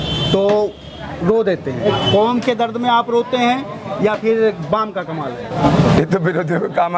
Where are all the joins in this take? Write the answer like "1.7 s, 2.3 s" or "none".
1.9 s, 5.6 s